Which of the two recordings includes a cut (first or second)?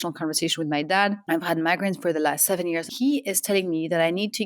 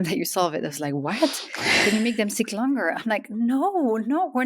first